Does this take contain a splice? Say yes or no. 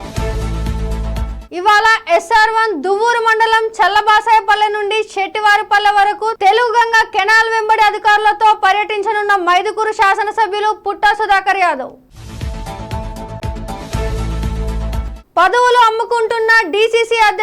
yes